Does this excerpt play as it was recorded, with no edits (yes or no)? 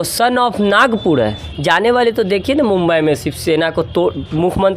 no